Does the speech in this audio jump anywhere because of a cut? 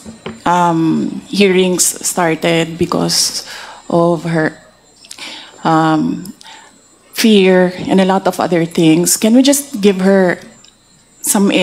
no; 0 cuts

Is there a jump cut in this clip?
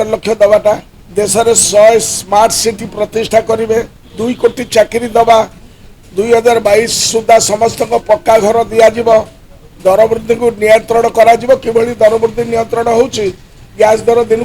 yes; 1 cut; at 1.0 s

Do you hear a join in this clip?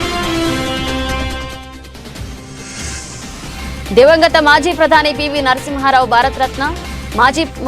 yes; 1 cut; at 2.4 s

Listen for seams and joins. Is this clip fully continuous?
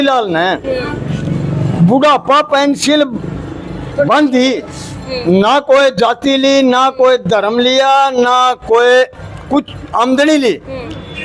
yes; 0 cuts

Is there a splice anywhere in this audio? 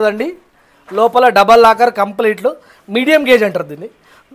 no; 0 cuts

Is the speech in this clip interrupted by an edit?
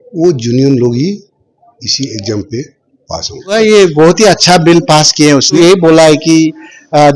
yes; 2 cuts; at 3.5 s, 5.6 s

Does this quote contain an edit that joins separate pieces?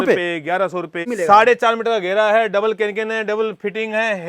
yes; 1 cut; at 1.0 s

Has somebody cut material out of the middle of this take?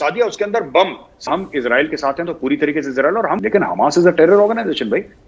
yes; 2 cuts; at 1.2 s, 3.4 s

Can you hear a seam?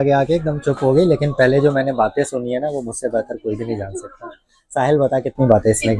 no; 0 cuts

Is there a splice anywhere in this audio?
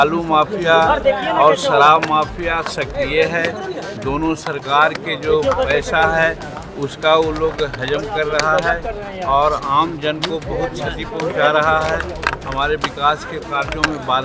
no; 0 cuts

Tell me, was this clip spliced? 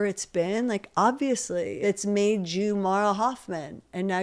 yes; 1 cut; at 1.8 s

